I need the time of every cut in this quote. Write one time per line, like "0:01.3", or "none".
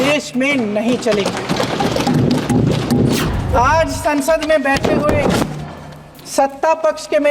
0:03.3